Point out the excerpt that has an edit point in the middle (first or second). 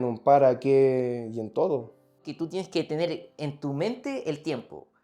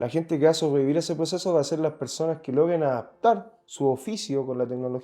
first